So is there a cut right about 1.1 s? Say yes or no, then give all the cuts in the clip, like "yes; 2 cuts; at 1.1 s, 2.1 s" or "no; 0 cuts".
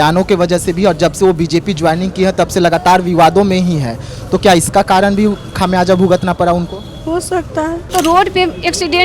no; 1 cut; at 7.9 s